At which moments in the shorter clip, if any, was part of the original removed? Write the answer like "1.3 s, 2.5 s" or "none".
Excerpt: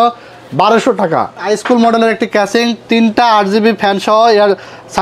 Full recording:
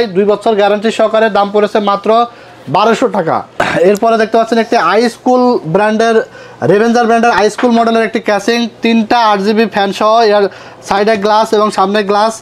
1.4 s